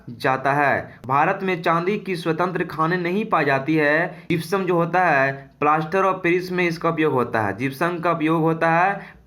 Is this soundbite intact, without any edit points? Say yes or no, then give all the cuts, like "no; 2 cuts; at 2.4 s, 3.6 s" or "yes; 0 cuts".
no; 2 cuts; at 0.9 s, 4.2 s